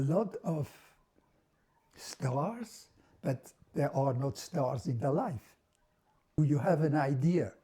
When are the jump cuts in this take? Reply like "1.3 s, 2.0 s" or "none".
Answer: 6.4 s